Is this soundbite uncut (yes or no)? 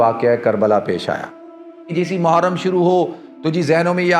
no